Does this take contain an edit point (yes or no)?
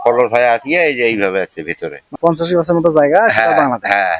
yes